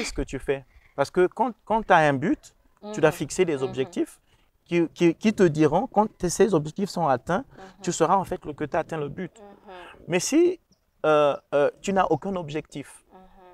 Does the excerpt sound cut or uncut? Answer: uncut